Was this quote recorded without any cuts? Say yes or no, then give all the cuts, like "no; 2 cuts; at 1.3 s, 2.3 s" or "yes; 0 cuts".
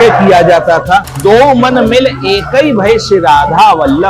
no; 1 cut; at 1.1 s